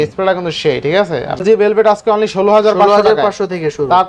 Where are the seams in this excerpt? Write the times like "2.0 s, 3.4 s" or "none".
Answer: 1.4 s